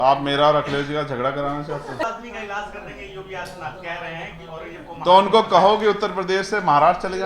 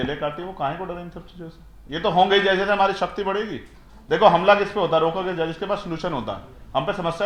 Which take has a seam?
first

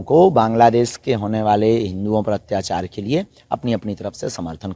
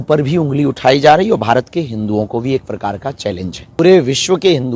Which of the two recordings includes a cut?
second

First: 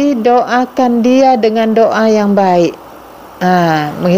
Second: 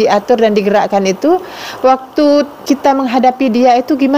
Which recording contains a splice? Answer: second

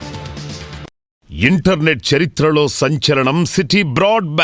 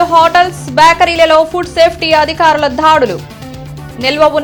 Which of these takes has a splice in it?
first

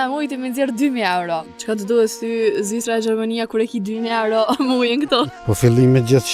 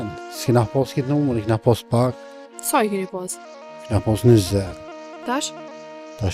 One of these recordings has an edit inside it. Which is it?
first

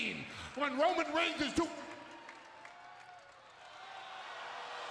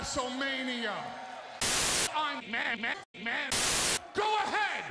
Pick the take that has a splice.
second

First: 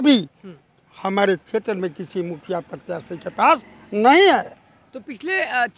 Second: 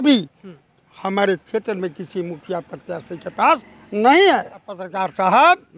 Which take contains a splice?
second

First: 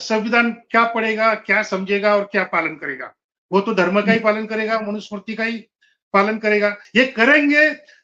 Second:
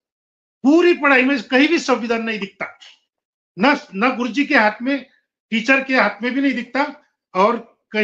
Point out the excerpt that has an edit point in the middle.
first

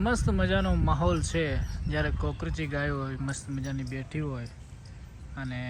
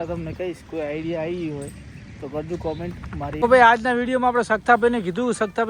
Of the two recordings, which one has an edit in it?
second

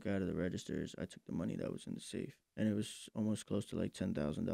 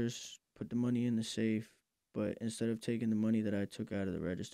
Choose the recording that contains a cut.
first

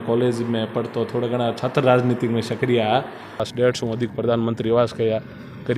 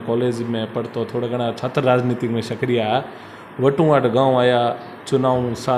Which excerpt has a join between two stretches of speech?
first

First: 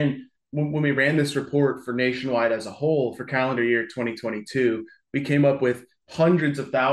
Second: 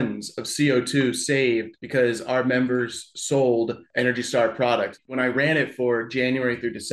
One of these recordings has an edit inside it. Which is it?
second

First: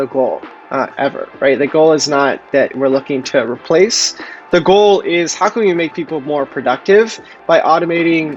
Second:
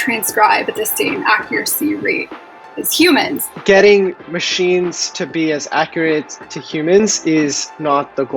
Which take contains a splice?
second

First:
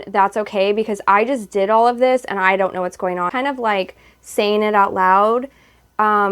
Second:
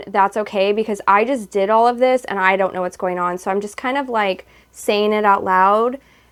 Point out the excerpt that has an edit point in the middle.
first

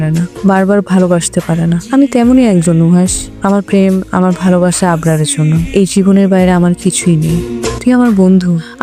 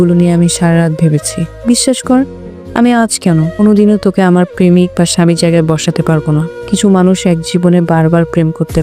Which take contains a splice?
second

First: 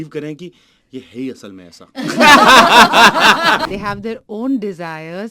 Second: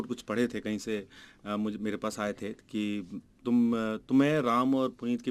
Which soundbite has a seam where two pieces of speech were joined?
first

